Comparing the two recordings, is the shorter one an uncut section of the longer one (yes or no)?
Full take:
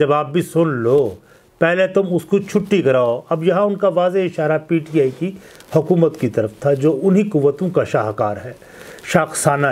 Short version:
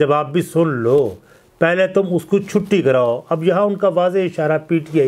yes